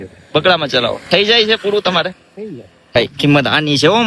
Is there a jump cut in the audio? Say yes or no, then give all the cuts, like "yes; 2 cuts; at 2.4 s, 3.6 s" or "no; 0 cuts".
yes; 1 cut; at 3.0 s